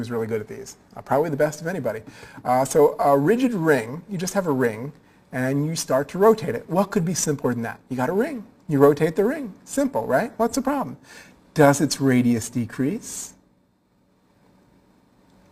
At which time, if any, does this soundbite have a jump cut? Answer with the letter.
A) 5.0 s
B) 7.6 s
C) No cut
C